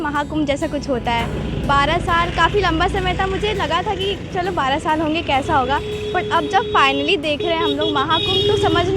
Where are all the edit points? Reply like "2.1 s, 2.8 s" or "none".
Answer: none